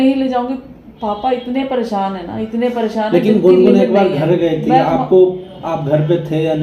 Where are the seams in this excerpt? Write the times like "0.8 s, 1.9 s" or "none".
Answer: none